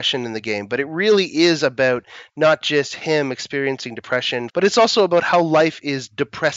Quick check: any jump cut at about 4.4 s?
yes; 1 cut; at 4.4 s

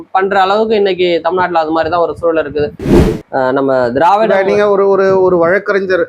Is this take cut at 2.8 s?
yes; 1 cut; at 2.8 s

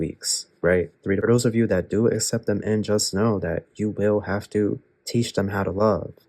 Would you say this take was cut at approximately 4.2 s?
no; 1 cut; at 1.2 s

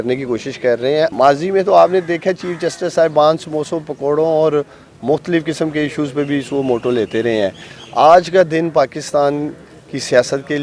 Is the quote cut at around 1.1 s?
yes; 1 cut; at 1.1 s

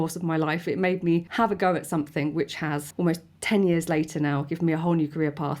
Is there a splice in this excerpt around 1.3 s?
yes; 2 cuts; at 1.3 s, 2.9 s

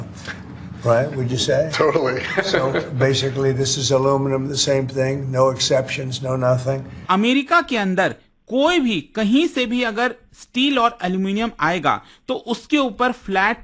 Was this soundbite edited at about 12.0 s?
no; 1 cut; at 6.9 s

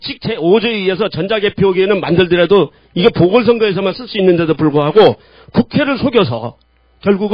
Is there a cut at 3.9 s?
yes; 1 cut; at 3.9 s

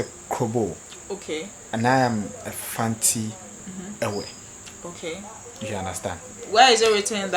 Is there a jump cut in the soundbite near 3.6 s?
no; 0 cuts

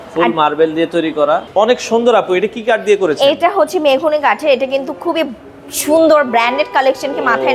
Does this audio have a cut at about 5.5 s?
no; 1 cut; at 1.5 s

